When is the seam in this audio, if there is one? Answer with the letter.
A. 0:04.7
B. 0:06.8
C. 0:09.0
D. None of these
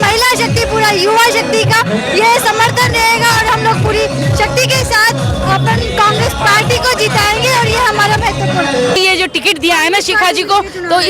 C